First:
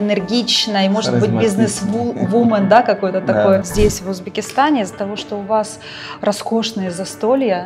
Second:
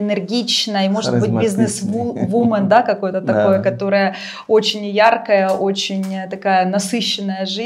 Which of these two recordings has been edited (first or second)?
first